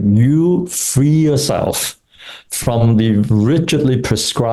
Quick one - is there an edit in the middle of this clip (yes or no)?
no